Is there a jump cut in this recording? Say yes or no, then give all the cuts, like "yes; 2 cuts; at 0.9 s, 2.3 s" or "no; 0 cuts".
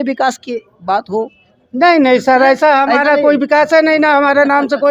no; 0 cuts